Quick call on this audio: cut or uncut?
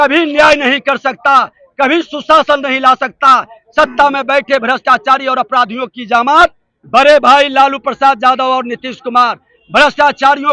cut